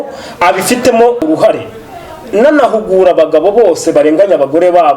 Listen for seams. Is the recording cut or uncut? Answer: cut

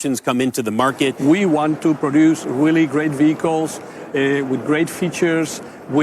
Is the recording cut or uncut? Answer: cut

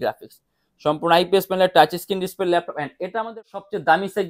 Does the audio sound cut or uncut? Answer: cut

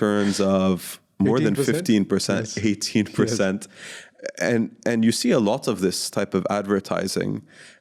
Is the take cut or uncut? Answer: uncut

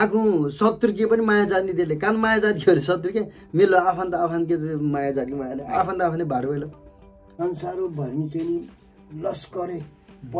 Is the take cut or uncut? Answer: cut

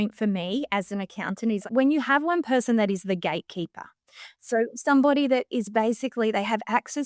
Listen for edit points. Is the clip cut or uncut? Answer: cut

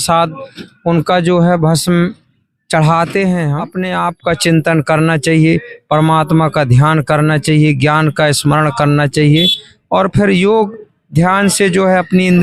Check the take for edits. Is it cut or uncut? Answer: cut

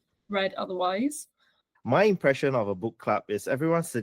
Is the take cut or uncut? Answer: cut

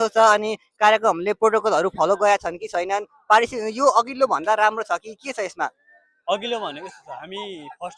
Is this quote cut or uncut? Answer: uncut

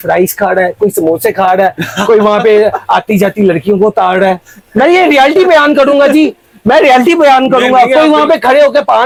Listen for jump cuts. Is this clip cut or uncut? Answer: uncut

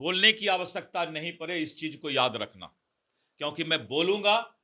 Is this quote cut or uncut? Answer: uncut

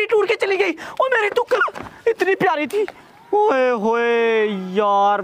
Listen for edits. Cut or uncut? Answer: uncut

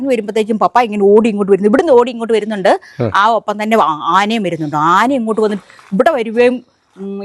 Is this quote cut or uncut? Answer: uncut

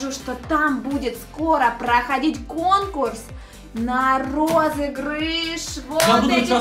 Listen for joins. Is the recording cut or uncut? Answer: uncut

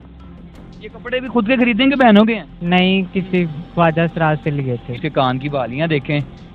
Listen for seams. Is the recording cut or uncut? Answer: cut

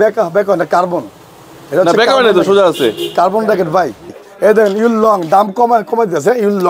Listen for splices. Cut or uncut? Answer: cut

